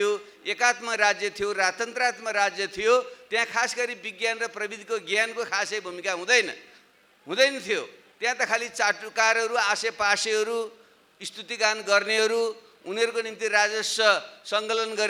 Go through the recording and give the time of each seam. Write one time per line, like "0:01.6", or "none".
none